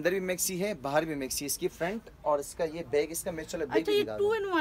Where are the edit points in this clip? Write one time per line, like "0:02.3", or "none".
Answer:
none